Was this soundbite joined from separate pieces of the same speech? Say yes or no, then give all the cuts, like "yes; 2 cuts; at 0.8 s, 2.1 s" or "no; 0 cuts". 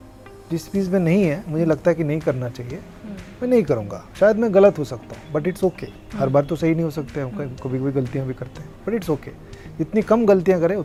no; 0 cuts